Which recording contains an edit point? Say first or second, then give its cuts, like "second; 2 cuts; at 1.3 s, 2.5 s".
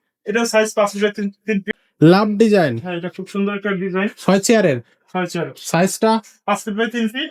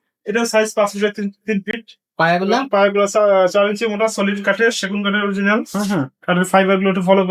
first; 1 cut; at 1.8 s